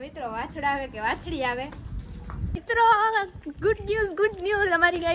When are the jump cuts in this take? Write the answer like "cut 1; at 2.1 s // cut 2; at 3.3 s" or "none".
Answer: cut 1; at 2.6 s